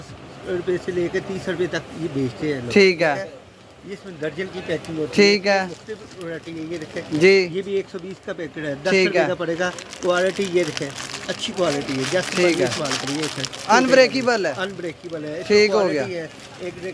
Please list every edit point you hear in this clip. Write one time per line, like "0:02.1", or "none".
none